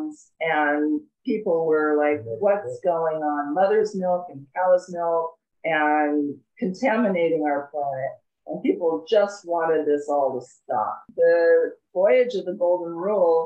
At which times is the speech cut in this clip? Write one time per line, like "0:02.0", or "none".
0:11.0